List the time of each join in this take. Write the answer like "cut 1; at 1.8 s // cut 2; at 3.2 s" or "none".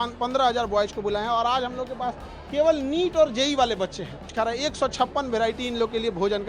cut 1; at 4.2 s